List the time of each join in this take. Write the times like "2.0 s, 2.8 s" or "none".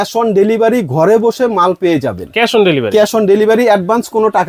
none